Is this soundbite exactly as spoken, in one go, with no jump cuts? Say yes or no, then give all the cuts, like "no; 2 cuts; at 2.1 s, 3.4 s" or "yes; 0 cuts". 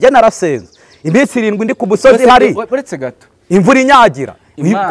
yes; 0 cuts